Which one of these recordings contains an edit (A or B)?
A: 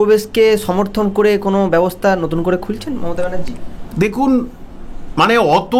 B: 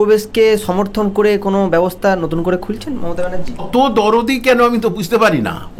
B